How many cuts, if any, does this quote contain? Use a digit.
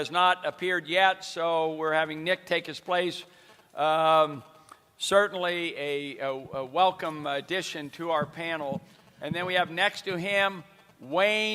1